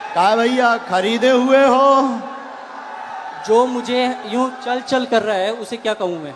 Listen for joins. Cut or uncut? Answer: uncut